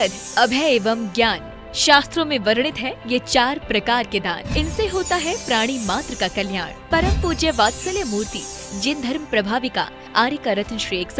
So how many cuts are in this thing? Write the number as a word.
one